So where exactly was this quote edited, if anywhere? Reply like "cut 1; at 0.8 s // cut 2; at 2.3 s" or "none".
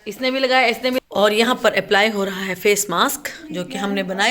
cut 1; at 1.0 s

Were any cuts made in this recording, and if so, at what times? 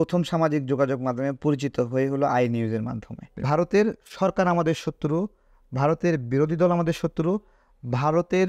cut 1; at 3.3 s

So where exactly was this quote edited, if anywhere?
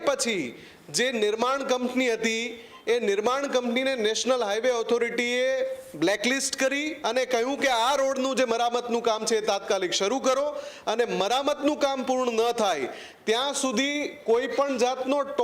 cut 1; at 6.9 s

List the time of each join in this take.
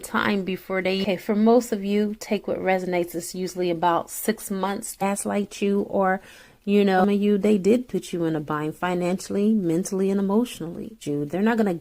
cut 1; at 1.0 s // cut 2; at 5.0 s // cut 3; at 7.0 s // cut 4; at 11.0 s

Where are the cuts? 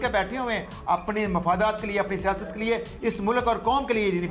none

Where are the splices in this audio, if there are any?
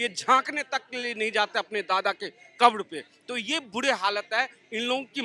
none

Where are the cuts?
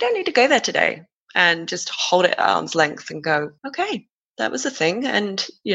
cut 1; at 3.6 s

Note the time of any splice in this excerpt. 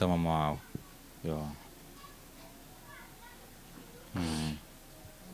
none

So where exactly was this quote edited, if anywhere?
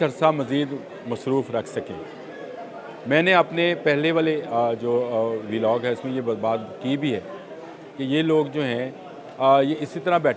none

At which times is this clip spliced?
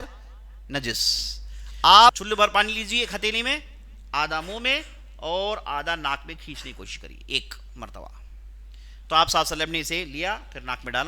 cut 1; at 2.2 s

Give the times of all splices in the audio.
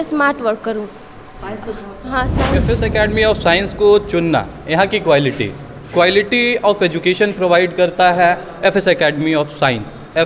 cut 1; at 2.6 s

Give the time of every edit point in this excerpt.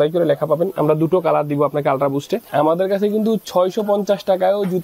cut 1; at 2.5 s

